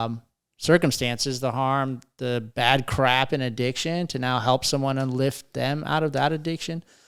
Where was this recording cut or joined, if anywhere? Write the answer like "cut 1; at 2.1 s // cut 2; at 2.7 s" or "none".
none